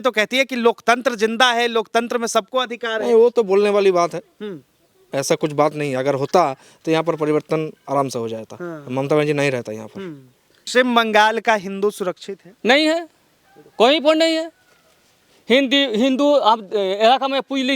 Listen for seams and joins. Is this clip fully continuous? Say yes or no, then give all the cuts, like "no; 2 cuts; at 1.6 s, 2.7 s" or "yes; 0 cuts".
no; 1 cut; at 10.6 s